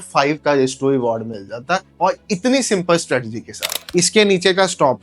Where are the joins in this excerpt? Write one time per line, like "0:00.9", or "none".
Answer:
0:03.8